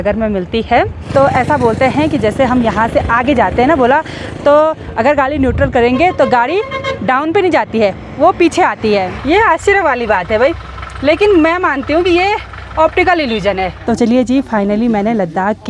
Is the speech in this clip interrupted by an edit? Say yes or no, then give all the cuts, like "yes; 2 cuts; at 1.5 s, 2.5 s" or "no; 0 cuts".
yes; 3 cuts; at 1.0 s, 9.1 s, 13.8 s